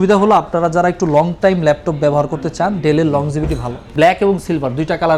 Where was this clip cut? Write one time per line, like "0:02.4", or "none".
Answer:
0:03.9